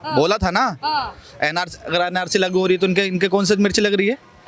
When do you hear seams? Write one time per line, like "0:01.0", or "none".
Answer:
none